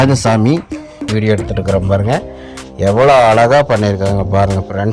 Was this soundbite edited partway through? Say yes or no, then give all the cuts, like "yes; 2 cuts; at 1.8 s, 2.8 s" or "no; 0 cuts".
yes; 1 cut; at 1.1 s